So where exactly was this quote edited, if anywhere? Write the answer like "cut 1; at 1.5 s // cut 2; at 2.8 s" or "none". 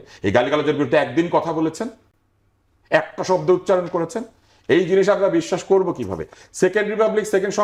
none